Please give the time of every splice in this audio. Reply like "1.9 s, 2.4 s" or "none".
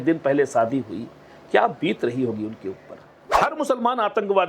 3.3 s